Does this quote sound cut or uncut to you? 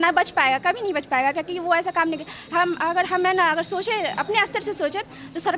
uncut